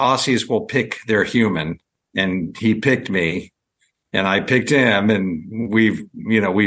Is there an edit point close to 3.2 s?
no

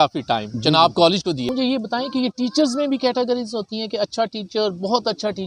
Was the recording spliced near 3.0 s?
no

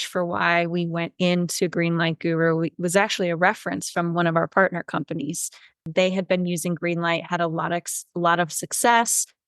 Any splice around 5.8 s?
yes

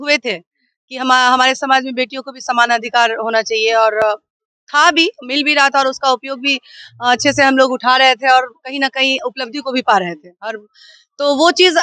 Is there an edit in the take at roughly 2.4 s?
no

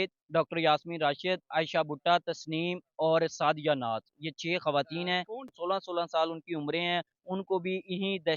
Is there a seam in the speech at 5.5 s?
yes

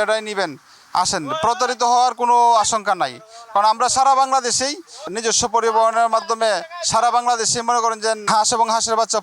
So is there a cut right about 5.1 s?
yes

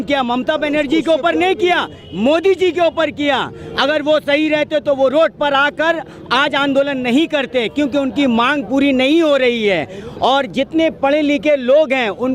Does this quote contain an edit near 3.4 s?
no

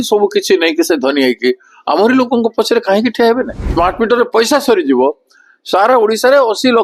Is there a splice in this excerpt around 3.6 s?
yes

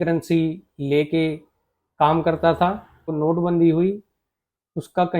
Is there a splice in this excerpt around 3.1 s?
yes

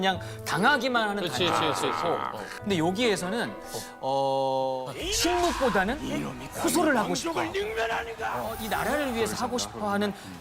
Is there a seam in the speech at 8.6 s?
yes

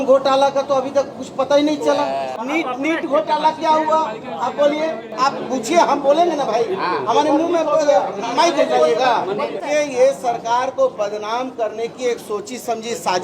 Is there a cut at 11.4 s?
no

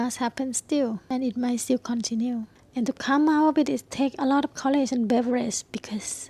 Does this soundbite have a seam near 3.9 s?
no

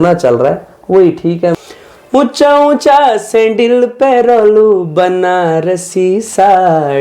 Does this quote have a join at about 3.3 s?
no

